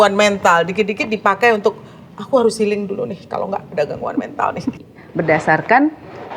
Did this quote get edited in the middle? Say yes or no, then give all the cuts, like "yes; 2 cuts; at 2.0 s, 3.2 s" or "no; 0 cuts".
yes; 1 cut; at 4.8 s